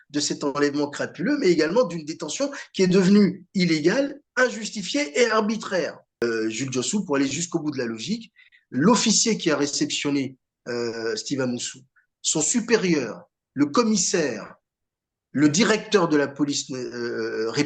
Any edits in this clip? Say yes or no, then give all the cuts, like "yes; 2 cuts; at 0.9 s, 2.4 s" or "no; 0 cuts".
yes; 1 cut; at 6.2 s